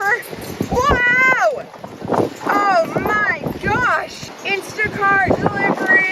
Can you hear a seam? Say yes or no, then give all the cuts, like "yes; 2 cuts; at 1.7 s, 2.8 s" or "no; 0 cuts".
yes; 1 cut; at 4.4 s